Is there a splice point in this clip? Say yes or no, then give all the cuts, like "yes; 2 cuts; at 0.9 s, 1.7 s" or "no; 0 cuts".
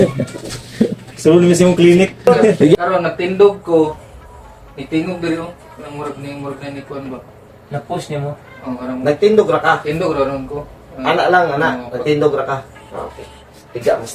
yes; 1 cut; at 2.9 s